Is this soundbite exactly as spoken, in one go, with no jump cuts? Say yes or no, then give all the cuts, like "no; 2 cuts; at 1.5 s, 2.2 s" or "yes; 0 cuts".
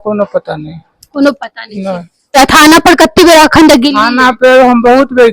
no; 1 cut; at 2.4 s